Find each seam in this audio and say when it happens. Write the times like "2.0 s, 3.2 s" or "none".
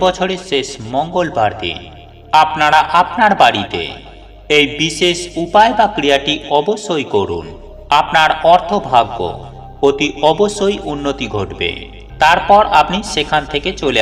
none